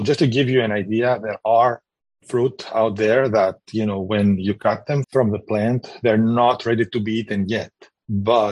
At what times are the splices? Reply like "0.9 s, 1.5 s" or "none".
5.0 s